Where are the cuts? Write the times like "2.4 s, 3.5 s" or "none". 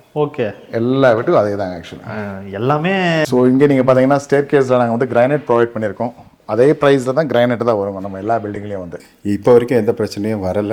3.2 s, 9.0 s